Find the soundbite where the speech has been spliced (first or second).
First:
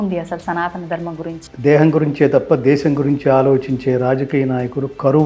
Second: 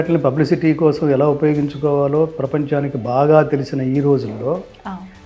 first